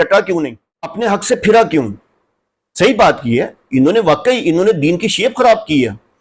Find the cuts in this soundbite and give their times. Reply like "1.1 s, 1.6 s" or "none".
0.9 s